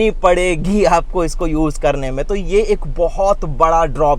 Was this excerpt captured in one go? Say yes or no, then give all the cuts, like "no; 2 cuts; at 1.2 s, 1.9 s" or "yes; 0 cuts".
yes; 0 cuts